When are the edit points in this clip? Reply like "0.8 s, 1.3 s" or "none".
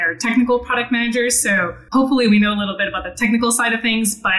1.7 s